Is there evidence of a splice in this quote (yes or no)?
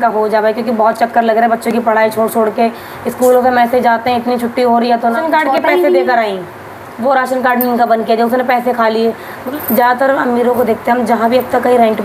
yes